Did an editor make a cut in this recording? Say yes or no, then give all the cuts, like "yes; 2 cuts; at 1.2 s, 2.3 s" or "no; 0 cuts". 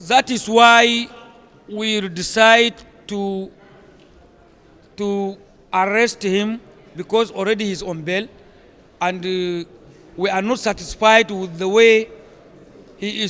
no; 0 cuts